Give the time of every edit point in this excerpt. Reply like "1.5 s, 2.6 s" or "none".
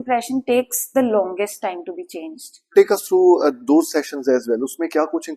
2.7 s